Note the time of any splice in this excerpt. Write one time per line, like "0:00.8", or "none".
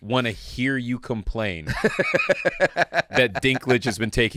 none